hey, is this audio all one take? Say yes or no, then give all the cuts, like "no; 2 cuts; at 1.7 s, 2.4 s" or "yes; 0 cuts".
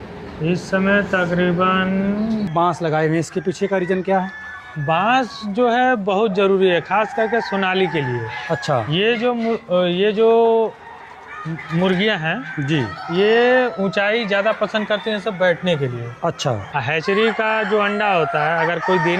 no; 2 cuts; at 2.5 s, 16.7 s